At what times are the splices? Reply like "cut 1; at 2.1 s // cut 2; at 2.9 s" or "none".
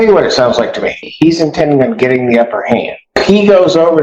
cut 1; at 1.1 s // cut 2; at 3.2 s